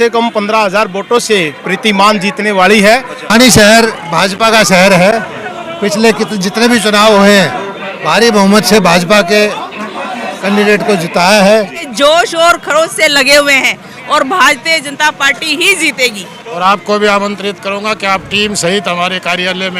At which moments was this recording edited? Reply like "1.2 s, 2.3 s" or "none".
3.2 s, 11.9 s, 16.4 s